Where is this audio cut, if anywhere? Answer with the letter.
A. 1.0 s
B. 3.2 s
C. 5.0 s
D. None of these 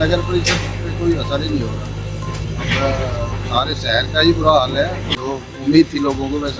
C